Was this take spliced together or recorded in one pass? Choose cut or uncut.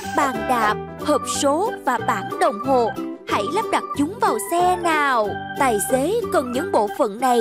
cut